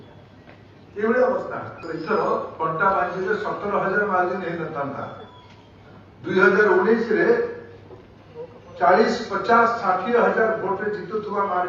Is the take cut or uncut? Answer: cut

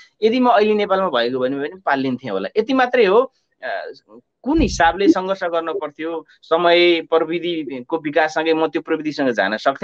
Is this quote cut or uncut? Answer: uncut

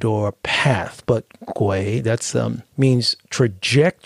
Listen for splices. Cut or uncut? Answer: cut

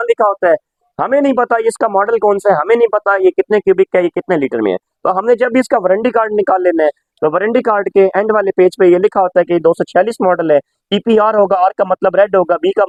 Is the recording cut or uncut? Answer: uncut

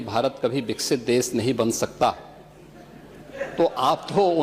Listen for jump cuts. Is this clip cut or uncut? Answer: uncut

